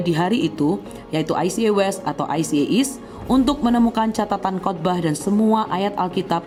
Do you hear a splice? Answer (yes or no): no